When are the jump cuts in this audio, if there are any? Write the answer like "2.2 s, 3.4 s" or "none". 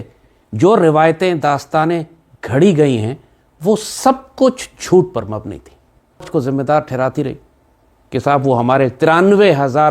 6.2 s